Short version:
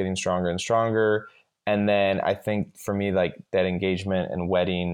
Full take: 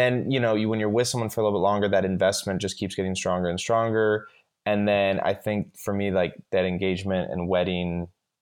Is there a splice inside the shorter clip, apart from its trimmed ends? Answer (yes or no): no